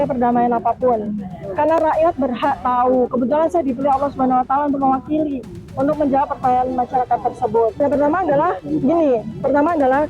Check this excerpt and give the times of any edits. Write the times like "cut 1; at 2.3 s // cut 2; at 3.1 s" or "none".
cut 1; at 7.7 s